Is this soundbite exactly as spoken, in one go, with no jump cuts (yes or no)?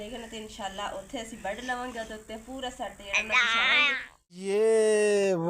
no